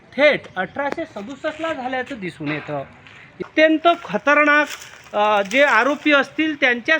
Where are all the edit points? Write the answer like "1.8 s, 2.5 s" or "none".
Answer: 3.4 s